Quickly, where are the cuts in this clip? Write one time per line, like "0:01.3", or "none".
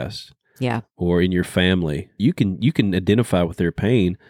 0:02.2